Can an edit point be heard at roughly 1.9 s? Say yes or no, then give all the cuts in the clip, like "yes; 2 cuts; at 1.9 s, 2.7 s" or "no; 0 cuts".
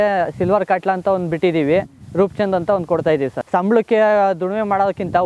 no; 1 cut; at 3.4 s